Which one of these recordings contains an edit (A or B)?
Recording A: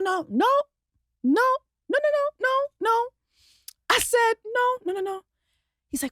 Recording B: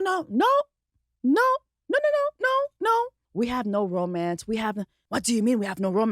B